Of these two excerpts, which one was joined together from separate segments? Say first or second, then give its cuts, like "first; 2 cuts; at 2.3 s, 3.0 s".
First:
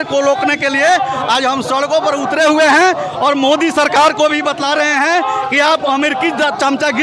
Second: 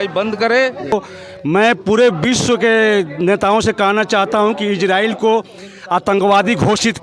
second; 1 cut; at 0.9 s